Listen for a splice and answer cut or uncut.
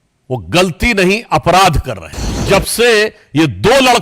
cut